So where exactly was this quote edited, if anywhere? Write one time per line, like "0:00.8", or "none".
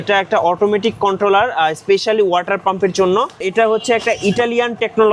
0:03.4